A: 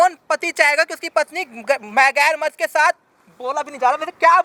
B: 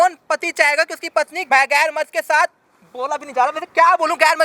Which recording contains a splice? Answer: B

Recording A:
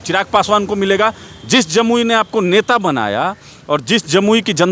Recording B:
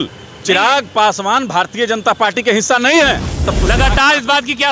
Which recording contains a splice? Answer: B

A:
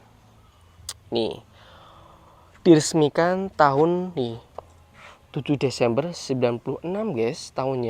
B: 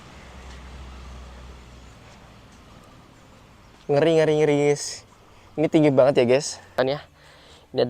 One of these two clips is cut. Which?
B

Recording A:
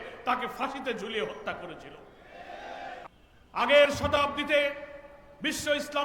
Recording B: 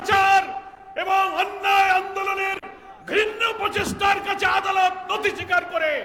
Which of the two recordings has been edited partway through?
A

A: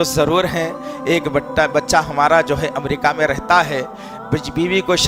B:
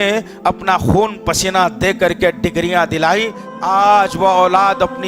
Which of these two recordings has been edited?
B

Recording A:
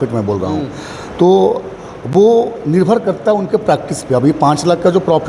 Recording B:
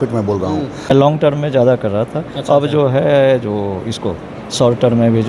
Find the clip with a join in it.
B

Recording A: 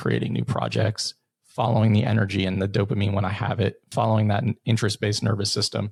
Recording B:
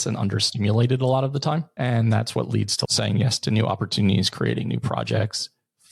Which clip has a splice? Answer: B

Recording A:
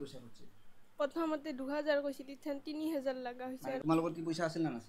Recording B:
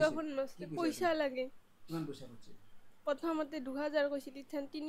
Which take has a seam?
A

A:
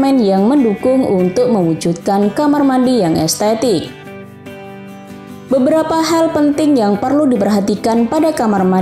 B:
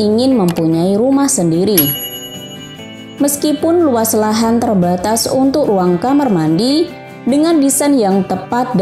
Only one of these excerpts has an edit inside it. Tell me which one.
A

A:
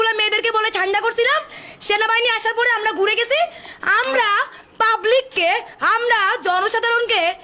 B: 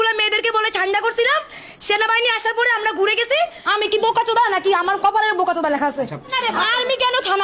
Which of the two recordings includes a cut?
B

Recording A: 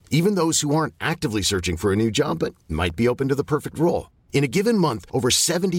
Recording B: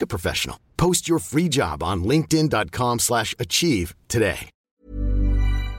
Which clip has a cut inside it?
B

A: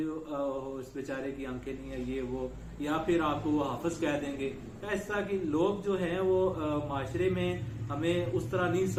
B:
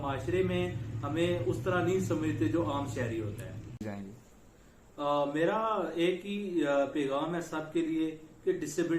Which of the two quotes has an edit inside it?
B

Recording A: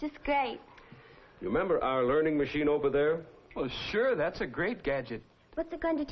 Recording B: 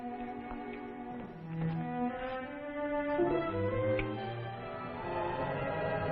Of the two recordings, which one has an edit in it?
A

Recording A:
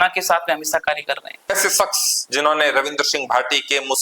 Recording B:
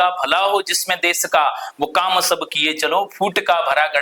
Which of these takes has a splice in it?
A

